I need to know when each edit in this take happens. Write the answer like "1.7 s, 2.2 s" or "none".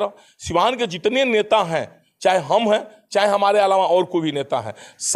none